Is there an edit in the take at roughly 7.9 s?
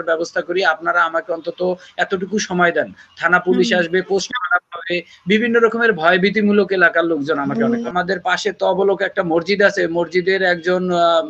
yes; 1 cut; at 7.9 s

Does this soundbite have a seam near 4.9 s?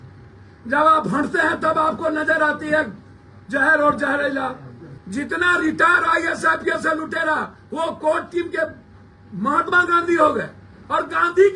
yes; 1 cut; at 4.9 s

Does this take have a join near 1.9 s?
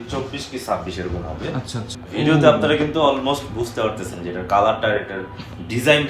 yes; 1 cut; at 1.9 s

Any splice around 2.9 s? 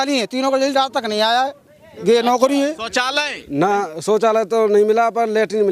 yes; 1 cut; at 2.9 s

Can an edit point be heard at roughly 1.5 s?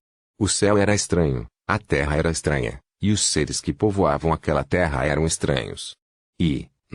yes; 1 cut; at 1.5 s

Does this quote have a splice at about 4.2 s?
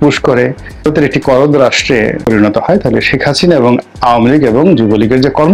no; 2 cuts; at 0.8 s, 2.2 s

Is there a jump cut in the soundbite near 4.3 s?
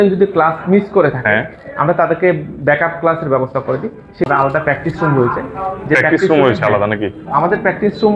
yes; 1 cut; at 4.3 s

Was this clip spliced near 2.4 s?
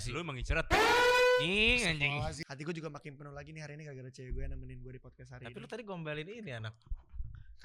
yes; 1 cut; at 2.4 s

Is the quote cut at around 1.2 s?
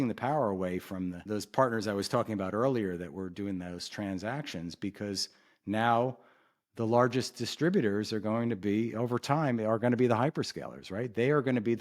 yes; 1 cut; at 1.2 s

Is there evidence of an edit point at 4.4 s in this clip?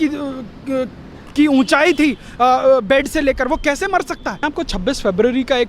yes; 1 cut; at 4.4 s

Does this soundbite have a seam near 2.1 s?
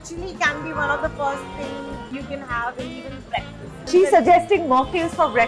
yes; 1 cut; at 2.1 s

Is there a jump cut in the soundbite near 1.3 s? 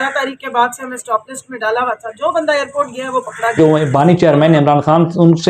no; 1 cut; at 3.6 s

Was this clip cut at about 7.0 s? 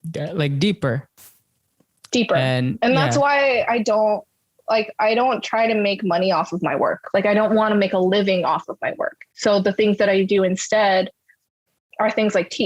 yes; 1 cut; at 7.0 s

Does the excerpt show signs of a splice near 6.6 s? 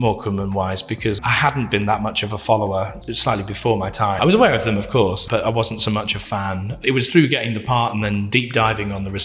no; 5 cuts; at 1.2 s, 2.9 s, 4.2 s, 5.2 s, 8.3 s

